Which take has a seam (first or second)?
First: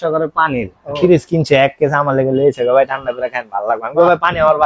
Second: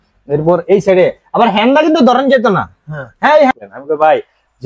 second